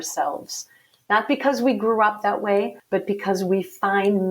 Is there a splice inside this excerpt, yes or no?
yes